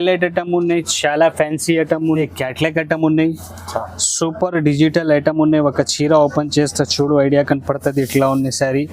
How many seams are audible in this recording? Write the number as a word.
one